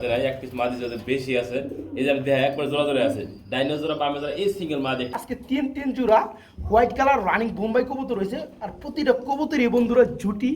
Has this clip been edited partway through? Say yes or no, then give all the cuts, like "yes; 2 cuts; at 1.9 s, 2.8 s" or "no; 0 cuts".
yes; 1 cut; at 5.3 s